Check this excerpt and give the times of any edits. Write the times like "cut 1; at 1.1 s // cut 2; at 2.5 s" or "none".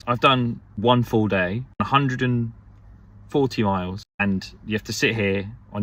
none